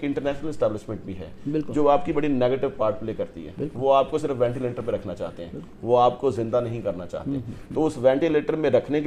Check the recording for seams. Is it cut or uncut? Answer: uncut